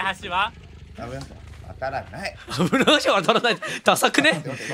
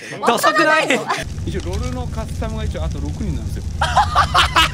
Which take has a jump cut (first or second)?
second